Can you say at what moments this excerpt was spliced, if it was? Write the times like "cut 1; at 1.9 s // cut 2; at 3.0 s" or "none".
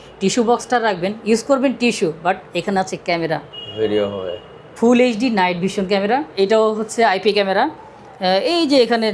cut 1; at 6.3 s